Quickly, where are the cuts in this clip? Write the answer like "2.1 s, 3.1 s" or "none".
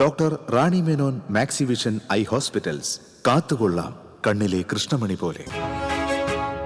5.4 s